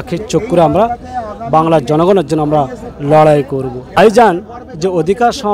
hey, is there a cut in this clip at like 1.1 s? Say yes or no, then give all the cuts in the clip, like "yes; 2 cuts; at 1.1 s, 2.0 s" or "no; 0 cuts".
no; 1 cut; at 3.9 s